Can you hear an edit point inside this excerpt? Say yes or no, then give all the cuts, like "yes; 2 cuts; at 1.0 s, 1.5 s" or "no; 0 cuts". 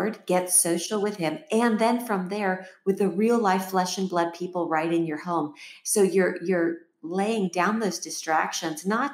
no; 0 cuts